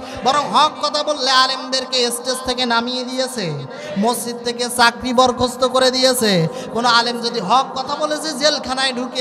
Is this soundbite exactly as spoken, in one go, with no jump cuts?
yes; 0 cuts

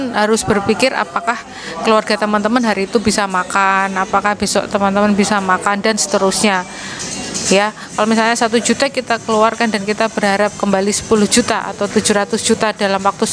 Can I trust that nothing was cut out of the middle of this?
yes; 0 cuts

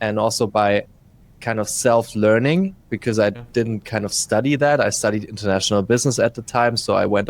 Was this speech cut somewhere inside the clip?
yes; 1 cut; at 3.4 s

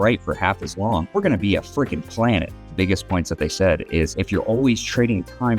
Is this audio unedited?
no; 3 cuts; at 1.1 s, 2.7 s, 4.2 s

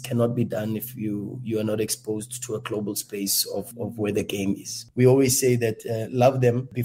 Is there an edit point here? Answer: yes; 1 cut; at 4.8 s

